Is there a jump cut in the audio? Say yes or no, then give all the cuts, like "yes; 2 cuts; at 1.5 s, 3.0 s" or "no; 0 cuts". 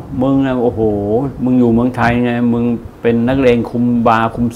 no; 0 cuts